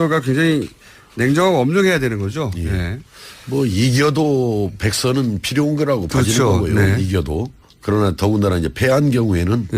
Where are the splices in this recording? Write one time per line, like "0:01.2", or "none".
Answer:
0:02.6

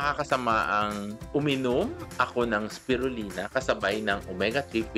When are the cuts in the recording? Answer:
none

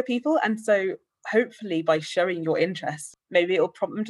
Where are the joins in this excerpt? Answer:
0:03.1

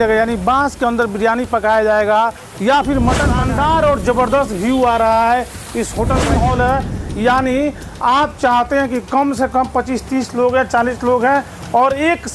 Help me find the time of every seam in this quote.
0:03.3
0:06.2

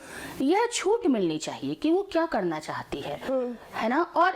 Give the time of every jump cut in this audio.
none

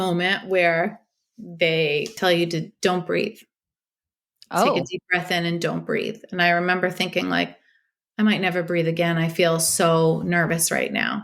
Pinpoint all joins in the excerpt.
0:02.1

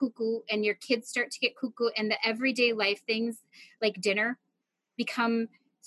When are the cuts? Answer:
none

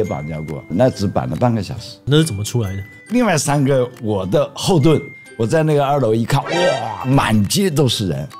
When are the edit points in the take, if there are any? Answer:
0:02.0
0:07.0

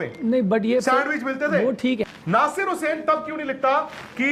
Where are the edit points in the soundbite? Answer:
0:02.0

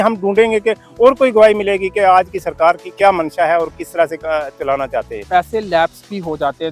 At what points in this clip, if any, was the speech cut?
0:05.1

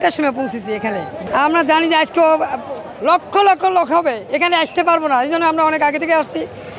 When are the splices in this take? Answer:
0:01.2

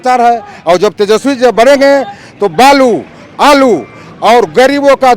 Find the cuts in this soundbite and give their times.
none

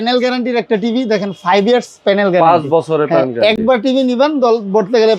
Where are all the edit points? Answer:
none

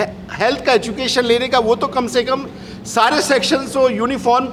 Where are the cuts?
none

